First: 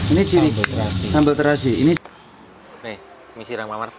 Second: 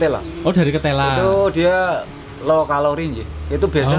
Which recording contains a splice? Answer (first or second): first